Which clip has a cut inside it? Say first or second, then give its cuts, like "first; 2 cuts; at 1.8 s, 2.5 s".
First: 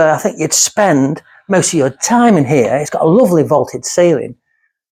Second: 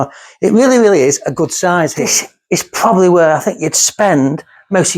second; 1 cut; at 2.1 s